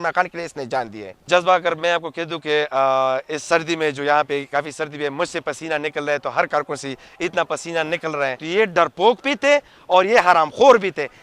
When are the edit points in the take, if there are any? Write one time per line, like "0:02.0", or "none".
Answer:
0:01.1
0:08.4